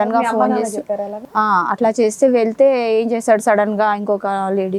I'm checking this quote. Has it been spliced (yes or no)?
no